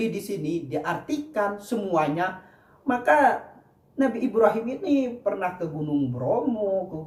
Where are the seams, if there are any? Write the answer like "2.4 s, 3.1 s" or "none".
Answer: none